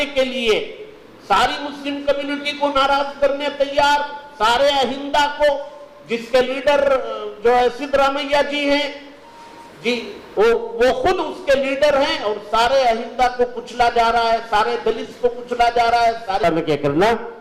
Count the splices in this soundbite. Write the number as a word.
one